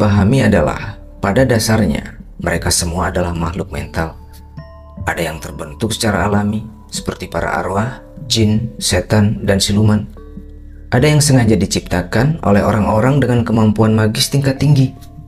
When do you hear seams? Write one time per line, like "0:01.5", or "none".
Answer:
none